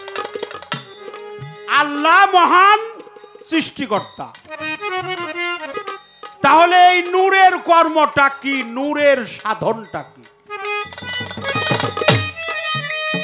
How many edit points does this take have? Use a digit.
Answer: 1